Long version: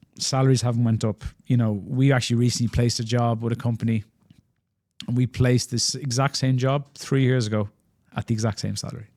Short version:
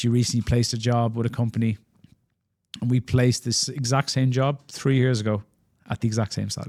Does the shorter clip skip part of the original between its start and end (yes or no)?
no